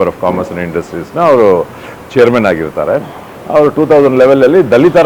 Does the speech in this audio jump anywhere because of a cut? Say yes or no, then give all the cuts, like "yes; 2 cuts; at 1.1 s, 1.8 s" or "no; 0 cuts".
no; 0 cuts